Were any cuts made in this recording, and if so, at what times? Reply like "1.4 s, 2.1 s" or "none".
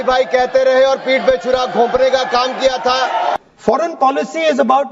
3.4 s